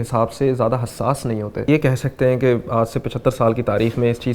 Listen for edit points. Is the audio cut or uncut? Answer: cut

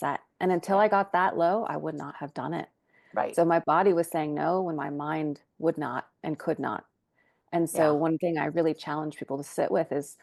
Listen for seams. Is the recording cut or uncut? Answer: uncut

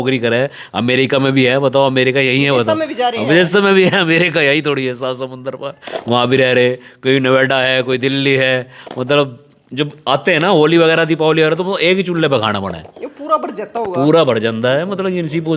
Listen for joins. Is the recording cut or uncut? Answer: uncut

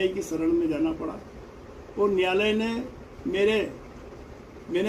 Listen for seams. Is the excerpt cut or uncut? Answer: uncut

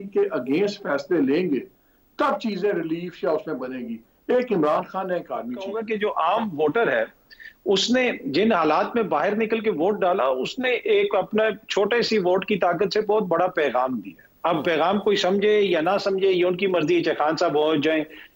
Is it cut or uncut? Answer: cut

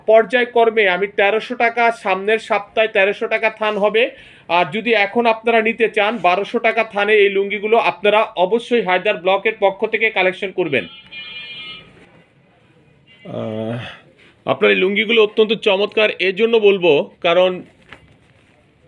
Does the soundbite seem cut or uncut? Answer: uncut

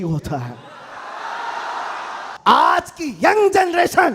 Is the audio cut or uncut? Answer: cut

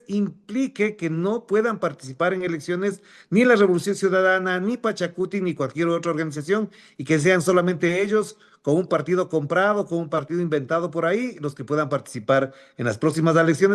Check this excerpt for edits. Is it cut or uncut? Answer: uncut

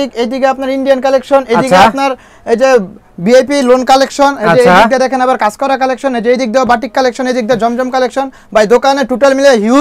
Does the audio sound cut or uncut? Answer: uncut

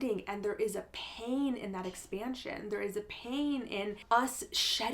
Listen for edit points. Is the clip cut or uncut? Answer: cut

